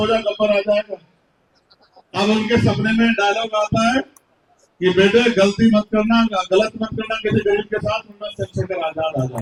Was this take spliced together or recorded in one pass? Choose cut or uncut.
uncut